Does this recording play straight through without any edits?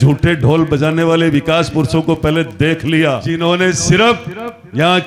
no; 1 cut; at 3.3 s

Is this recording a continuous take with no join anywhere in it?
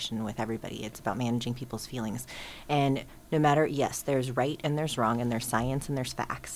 yes; 0 cuts

